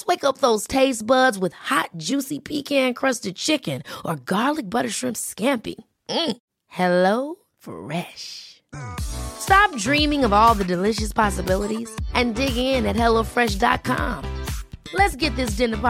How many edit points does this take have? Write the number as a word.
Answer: zero